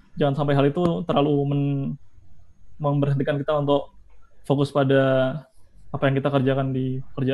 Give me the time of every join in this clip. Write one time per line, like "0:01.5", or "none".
none

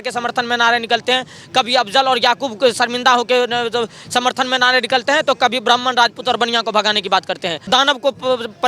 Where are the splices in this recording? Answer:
0:07.7

